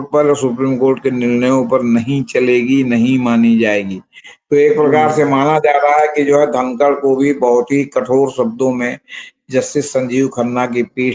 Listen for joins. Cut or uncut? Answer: uncut